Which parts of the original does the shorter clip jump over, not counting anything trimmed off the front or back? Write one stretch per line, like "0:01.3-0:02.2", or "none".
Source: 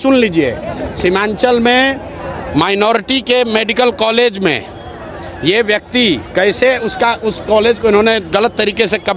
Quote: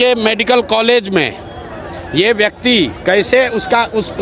none

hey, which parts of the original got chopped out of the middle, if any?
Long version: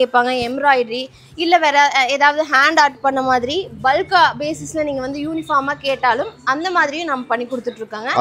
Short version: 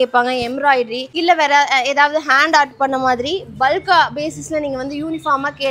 0:01.0-0:01.3

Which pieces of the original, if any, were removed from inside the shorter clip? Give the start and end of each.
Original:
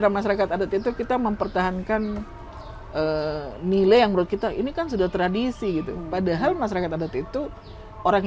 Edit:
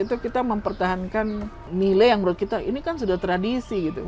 0:02.3-0:03.5

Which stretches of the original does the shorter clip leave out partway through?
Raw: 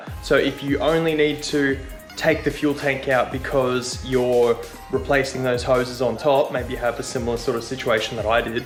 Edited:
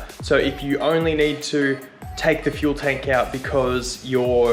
none

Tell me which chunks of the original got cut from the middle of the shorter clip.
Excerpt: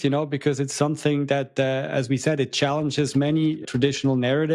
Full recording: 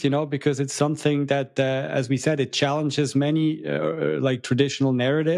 0:03.6-0:04.4

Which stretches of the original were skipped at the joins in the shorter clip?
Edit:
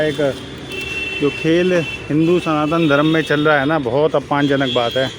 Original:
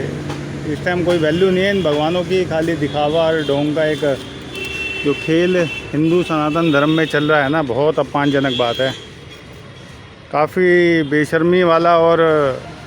none

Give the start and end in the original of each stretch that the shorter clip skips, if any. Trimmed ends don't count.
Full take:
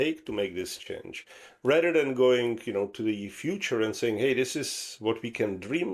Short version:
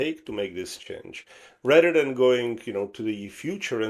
none

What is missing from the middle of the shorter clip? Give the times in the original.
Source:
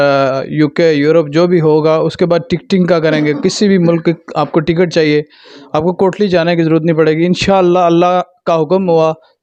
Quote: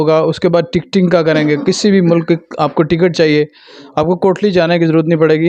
none

